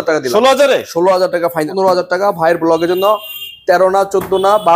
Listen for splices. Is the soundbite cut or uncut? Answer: cut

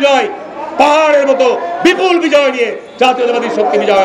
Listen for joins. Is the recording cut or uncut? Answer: uncut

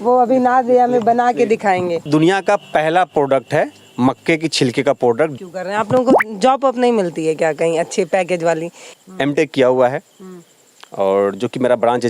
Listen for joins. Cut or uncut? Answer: cut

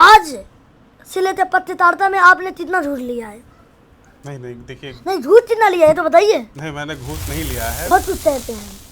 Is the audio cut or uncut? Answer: cut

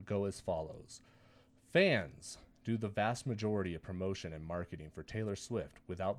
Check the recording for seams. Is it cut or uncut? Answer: uncut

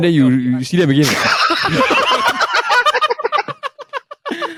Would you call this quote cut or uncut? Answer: uncut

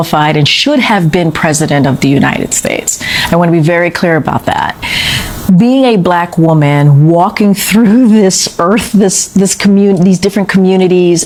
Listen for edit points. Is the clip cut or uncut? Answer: uncut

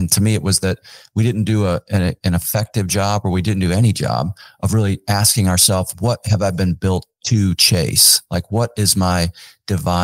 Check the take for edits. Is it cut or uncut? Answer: cut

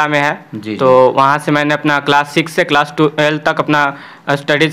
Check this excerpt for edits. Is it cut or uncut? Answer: uncut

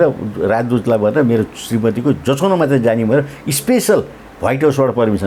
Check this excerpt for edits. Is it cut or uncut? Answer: uncut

